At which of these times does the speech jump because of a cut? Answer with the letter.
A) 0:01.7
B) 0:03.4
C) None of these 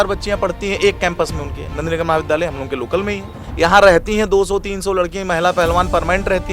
B